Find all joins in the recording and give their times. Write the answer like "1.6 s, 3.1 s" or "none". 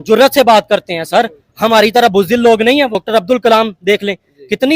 3.0 s